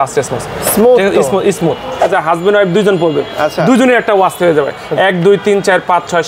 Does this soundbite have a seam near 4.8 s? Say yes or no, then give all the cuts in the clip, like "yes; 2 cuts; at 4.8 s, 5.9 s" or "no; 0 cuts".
no; 1 cut; at 2.1 s